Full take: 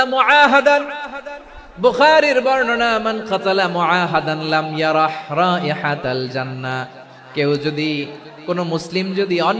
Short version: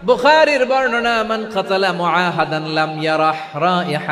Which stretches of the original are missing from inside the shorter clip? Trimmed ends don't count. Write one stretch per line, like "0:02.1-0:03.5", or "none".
none